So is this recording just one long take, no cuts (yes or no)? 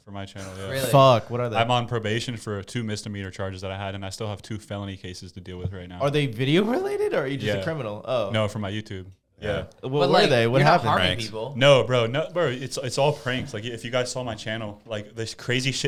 yes